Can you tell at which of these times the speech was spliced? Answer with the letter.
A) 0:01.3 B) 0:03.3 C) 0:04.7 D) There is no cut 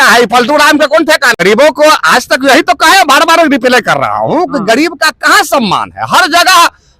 A